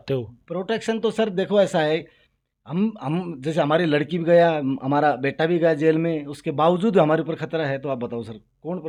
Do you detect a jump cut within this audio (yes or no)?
no